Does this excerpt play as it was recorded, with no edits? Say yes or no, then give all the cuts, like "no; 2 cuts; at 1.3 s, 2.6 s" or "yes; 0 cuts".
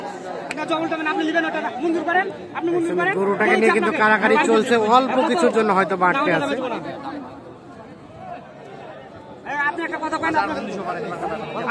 yes; 0 cuts